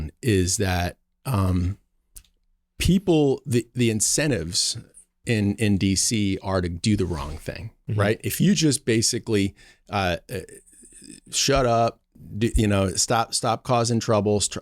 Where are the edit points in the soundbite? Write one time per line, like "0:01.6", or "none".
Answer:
none

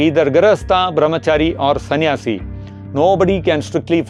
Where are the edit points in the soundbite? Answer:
none

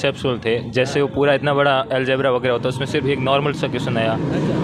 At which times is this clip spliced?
none

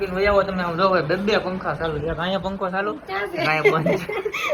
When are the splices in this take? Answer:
none

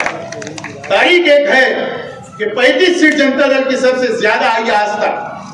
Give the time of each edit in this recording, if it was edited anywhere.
none

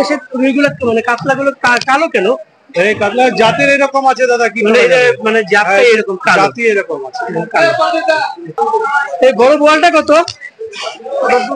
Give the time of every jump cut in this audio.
0:08.5

